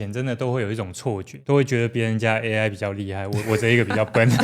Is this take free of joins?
no; 1 cut; at 1.3 s

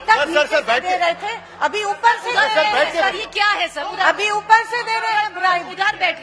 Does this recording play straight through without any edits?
yes; 0 cuts

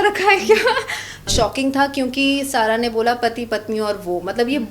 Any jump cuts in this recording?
yes; 1 cut; at 1.3 s

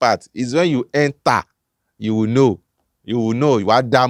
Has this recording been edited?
no; 0 cuts

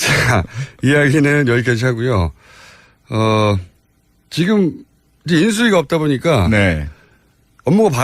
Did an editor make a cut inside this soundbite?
no; 0 cuts

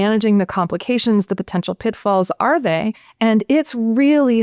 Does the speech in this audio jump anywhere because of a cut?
yes; 1 cut; at 3.0 s

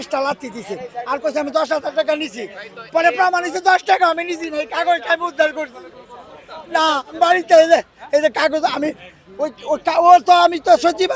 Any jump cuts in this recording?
no; 0 cuts

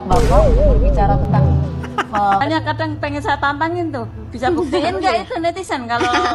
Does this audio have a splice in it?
yes; 1 cut; at 2.4 s

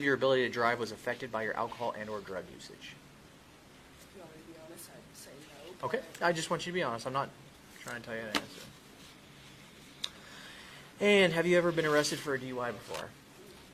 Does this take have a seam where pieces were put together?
no; 0 cuts

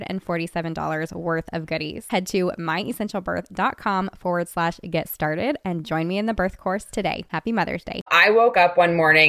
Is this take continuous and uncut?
no; 1 cut; at 8.1 s

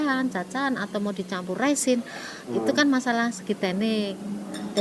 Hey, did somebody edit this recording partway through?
no; 0 cuts

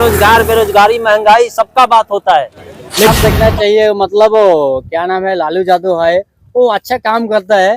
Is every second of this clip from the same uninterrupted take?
no; 1 cut; at 3.1 s

